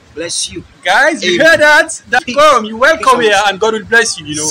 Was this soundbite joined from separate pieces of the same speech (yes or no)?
no